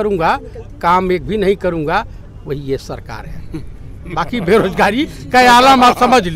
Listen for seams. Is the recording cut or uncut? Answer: uncut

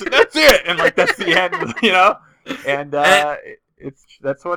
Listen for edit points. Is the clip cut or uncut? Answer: uncut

